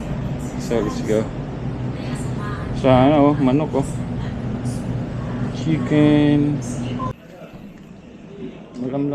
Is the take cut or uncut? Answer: cut